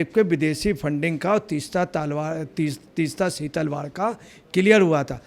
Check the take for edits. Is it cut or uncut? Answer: uncut